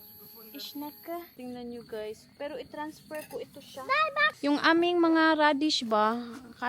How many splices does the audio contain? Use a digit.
2